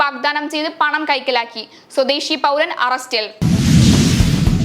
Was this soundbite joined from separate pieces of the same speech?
yes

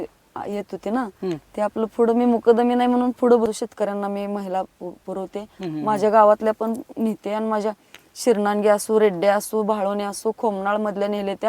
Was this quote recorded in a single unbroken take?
no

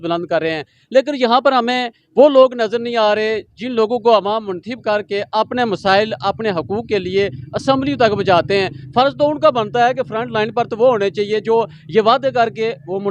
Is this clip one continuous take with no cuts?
yes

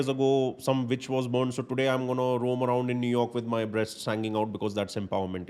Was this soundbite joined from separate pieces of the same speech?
no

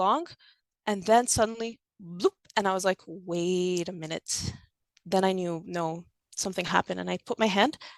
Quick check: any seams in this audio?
no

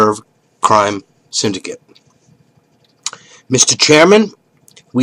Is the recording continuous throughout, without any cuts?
no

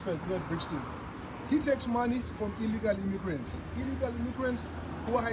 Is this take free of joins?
yes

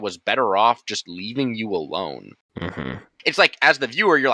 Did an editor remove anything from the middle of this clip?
yes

